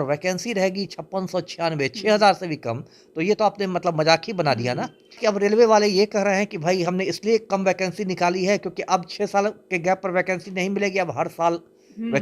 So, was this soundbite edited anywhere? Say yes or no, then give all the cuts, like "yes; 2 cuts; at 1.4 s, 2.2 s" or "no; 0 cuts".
yes; 1 cut; at 5.2 s